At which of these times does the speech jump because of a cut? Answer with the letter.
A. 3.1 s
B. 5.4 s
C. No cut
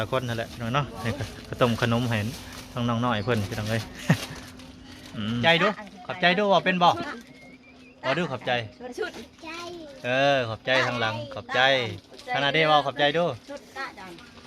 B